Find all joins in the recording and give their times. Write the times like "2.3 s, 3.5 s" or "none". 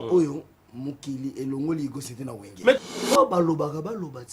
2.8 s